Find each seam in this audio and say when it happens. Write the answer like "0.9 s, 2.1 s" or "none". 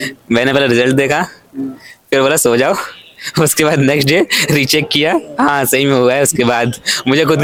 none